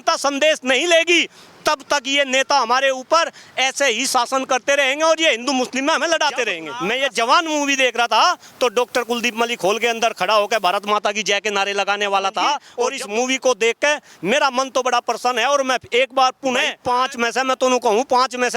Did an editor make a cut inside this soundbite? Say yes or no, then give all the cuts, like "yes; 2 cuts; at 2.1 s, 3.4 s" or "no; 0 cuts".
yes; 3 cuts; at 6.7 s, 12.7 s, 16.7 s